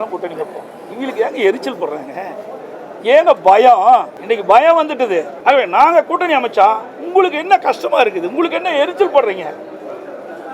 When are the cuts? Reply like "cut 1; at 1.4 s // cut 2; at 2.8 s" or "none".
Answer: cut 1; at 4.1 s // cut 2; at 5.3 s